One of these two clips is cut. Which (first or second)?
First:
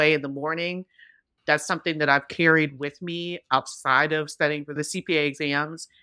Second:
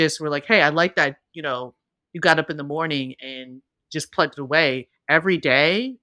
first